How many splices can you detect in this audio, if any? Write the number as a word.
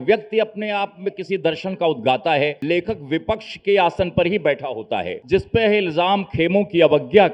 two